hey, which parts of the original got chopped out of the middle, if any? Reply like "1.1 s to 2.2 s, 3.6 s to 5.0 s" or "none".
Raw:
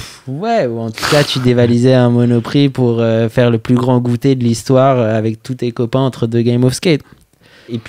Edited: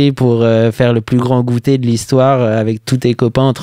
none